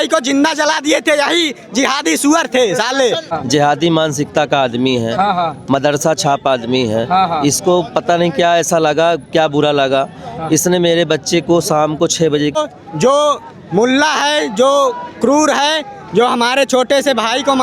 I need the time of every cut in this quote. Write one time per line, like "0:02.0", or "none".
0:03.3
0:12.6